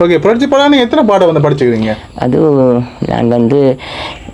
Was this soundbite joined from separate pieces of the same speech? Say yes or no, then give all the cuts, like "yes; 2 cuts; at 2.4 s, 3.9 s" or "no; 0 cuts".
no; 0 cuts